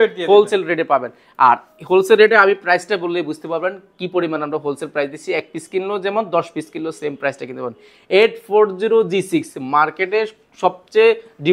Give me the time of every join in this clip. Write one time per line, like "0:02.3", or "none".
none